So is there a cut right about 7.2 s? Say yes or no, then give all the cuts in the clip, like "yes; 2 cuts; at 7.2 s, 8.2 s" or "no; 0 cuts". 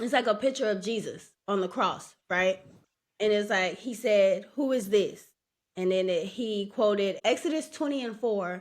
yes; 1 cut; at 7.2 s